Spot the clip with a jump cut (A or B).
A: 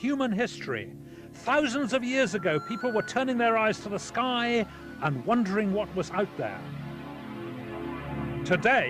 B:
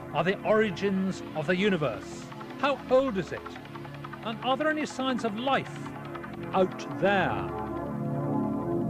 B